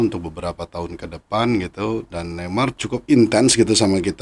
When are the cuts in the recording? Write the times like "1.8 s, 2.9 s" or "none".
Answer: 2.7 s